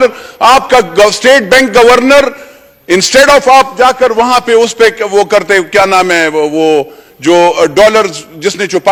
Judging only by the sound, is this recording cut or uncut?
uncut